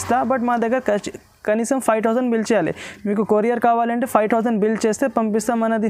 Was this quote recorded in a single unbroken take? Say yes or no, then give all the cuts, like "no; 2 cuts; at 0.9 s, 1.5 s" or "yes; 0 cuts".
yes; 0 cuts